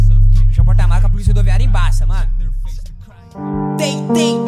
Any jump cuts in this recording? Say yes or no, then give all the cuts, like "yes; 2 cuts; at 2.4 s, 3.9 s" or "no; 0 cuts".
yes; 1 cut; at 3.5 s